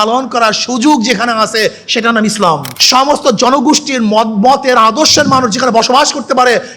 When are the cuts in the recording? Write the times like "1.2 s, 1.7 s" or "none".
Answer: 2.7 s